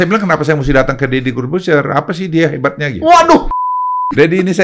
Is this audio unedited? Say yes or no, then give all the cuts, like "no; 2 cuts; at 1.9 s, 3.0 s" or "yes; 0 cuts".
no; 1 cut; at 3.6 s